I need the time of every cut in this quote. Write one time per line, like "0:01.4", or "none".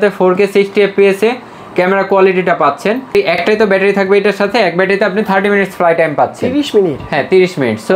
none

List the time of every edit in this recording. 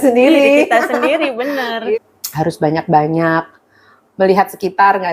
0:02.0

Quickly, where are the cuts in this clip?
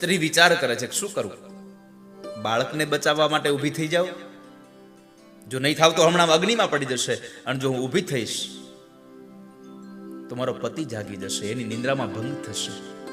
0:02.1

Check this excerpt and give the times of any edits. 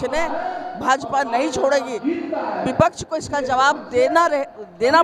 none

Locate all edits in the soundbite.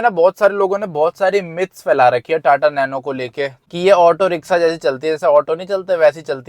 0:03.6

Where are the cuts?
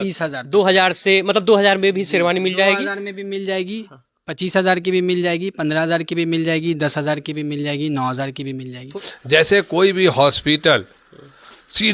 0:09.1

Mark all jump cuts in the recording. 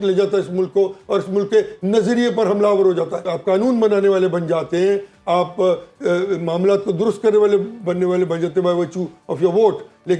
0:03.3

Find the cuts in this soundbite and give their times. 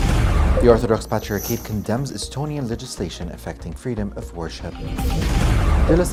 none

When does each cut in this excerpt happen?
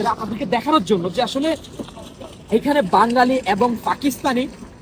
none

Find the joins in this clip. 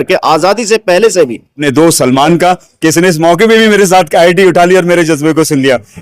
0:01.6

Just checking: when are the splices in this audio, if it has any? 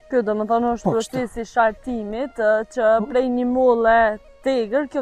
none

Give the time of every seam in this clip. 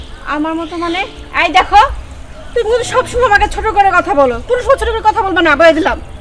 none

